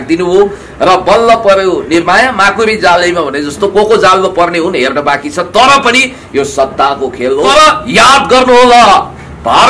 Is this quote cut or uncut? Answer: cut